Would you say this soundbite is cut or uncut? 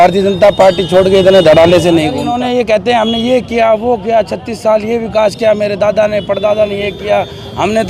cut